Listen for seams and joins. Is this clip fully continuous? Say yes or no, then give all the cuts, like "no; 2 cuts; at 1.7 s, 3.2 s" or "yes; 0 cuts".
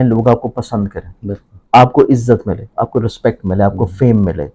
yes; 0 cuts